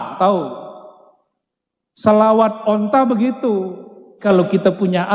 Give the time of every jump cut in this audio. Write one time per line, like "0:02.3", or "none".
0:04.2